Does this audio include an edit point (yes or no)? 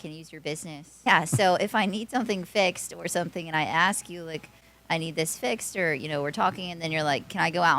yes